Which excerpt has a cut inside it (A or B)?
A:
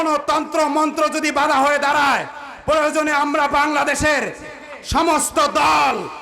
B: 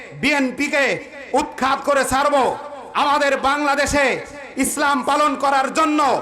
A